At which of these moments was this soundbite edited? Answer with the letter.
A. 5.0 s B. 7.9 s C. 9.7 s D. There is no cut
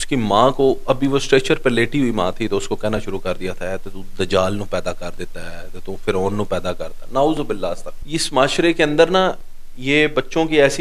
B